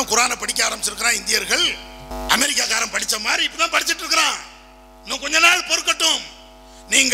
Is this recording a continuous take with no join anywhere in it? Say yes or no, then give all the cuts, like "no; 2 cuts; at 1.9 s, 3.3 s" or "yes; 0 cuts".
no; 1 cut; at 2.1 s